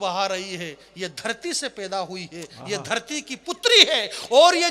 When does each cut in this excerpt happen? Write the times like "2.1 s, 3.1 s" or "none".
none